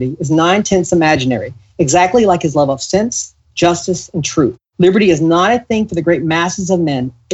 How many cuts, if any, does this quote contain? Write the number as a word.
zero